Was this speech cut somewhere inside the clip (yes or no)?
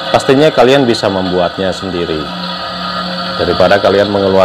no